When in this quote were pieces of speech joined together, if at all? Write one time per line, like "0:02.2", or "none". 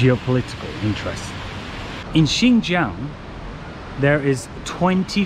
0:01.9